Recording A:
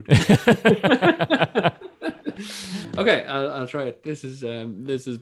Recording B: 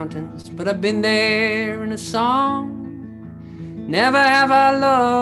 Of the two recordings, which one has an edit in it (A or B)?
A